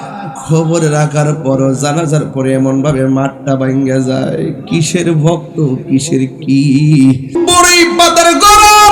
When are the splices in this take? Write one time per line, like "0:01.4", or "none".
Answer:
0:07.3